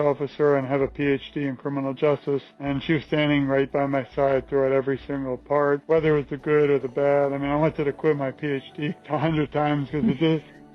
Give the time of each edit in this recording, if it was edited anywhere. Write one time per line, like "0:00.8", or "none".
0:02.5
0:05.8
0:09.0

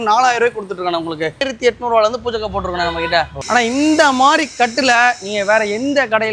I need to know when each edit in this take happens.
0:01.4
0:03.3

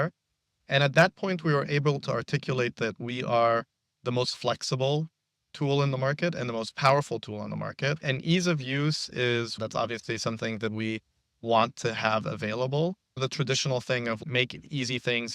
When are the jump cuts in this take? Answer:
0:09.5
0:13.2
0:14.2

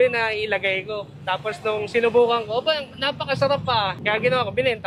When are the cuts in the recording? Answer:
none

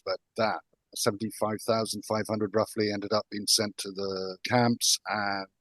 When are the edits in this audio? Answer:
0:04.4

